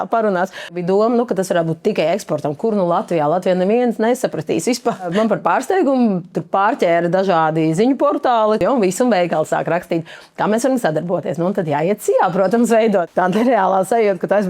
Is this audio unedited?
no; 4 cuts; at 0.8 s, 5.1 s, 8.6 s, 13.1 s

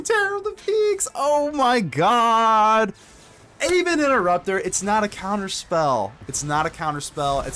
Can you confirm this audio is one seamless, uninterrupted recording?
yes; 0 cuts

